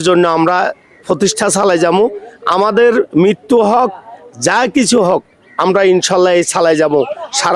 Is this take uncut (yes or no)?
yes